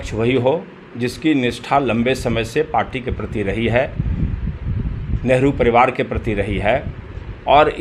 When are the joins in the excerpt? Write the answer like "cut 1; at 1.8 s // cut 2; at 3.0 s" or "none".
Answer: none

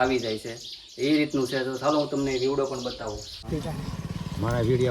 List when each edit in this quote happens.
cut 1; at 3.5 s

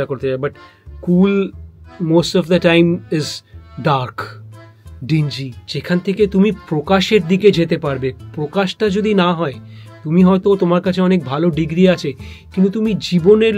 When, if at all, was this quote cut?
cut 1; at 5.6 s

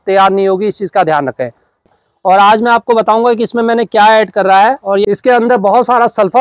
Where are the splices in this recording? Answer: cut 1; at 1.9 s // cut 2; at 5.0 s

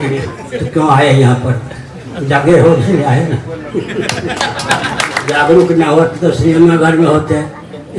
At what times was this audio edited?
cut 1; at 5.2 s

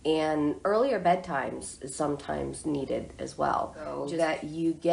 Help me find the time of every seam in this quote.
cut 1; at 4.0 s

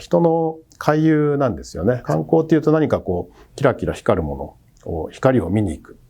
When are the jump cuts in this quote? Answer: cut 1; at 2.0 s

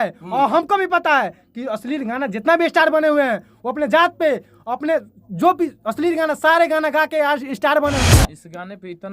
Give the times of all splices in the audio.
cut 1; at 8.0 s

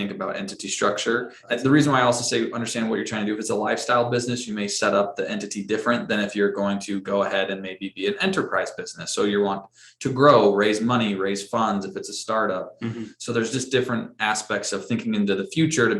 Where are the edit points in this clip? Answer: cut 1; at 1.4 s

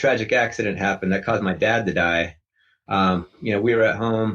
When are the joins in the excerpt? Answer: none

